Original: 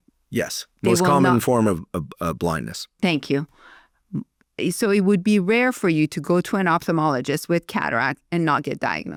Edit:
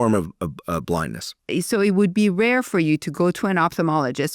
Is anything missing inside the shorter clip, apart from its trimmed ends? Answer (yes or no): yes